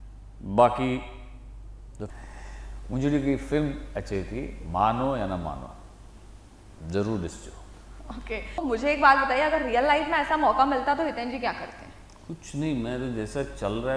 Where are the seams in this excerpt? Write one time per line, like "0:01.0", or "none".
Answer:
0:02.1
0:08.6